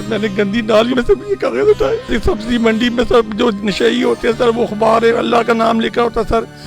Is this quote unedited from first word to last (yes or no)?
no